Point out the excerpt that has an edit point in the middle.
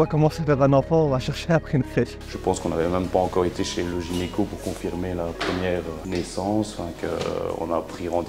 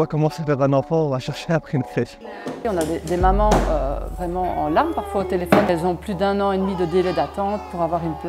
second; 2 cuts; at 2.6 s, 5.7 s

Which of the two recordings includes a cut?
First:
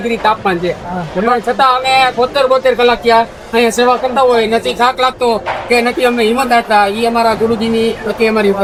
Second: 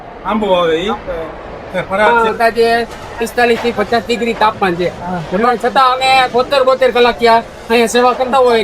second; 1 cut; at 2.1 s

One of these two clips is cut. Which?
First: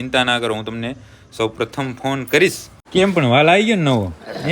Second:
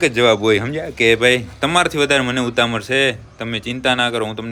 first; 1 cut; at 2.7 s

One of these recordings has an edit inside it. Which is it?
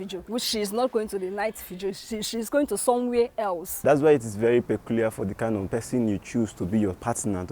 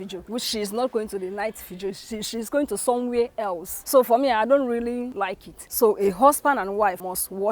first; 2 cuts; at 3.7 s, 5.7 s

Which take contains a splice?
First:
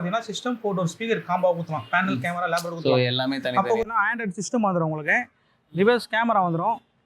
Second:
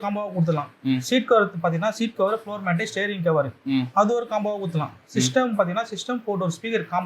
first; 1 cut; at 3.9 s

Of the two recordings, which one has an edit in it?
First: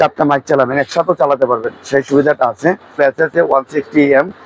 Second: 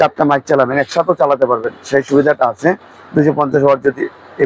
first; 1 cut; at 3.0 s

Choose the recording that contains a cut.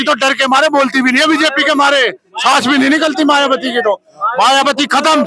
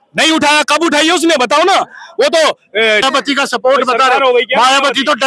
second; 1 cut; at 3.0 s

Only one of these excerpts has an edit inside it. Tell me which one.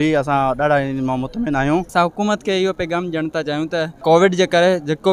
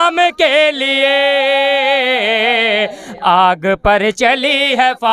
first; 2 cuts; at 1.9 s, 3.9 s

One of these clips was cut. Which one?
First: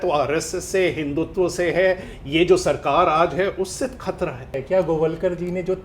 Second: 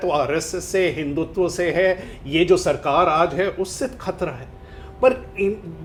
first; 1 cut; at 4.5 s

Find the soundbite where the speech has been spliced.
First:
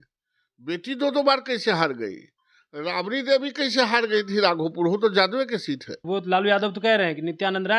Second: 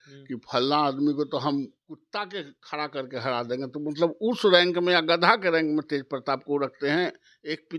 first; 1 cut; at 5.9 s

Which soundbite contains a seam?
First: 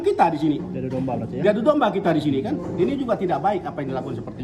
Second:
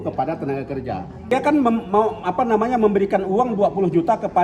second; 1 cut; at 1.3 s

